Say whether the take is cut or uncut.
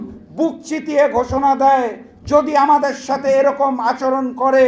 uncut